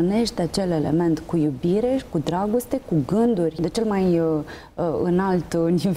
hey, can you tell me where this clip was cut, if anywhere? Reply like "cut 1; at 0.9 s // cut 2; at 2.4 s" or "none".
cut 1; at 3.6 s